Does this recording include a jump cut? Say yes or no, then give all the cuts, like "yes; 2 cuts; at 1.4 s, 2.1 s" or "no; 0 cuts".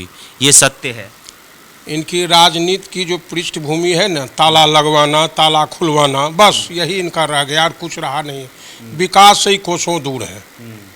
no; 0 cuts